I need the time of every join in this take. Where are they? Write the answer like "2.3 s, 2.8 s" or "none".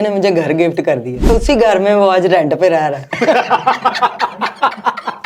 1.3 s